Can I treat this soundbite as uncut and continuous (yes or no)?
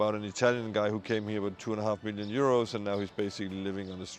yes